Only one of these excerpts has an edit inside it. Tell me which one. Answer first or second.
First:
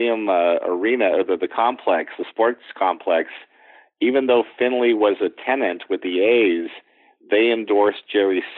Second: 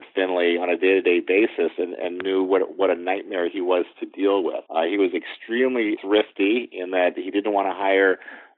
second